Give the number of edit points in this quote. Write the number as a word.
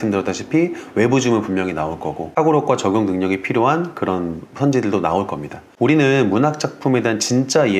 two